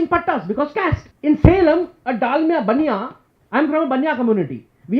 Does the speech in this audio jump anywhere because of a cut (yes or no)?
yes